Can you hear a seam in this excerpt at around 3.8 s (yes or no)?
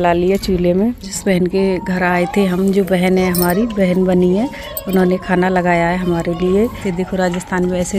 no